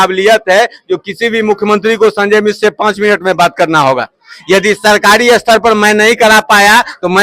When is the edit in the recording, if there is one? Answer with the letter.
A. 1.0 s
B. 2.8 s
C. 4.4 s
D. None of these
D